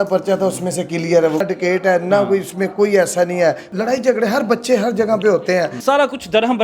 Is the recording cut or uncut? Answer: cut